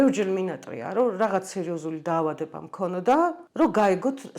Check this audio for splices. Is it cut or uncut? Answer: cut